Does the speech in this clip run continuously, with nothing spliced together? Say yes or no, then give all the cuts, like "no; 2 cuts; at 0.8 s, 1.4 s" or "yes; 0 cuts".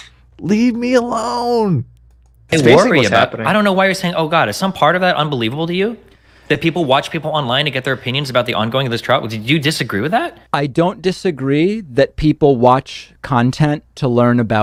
yes; 0 cuts